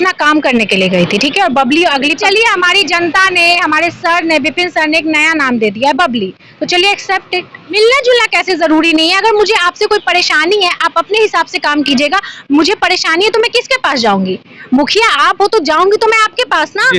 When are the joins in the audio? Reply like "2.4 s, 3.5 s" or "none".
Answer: 2.2 s, 7.7 s